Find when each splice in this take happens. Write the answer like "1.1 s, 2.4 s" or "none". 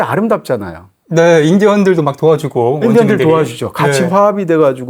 none